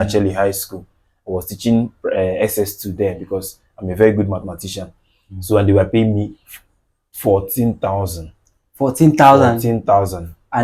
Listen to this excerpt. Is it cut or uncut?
uncut